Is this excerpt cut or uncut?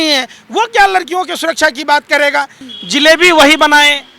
cut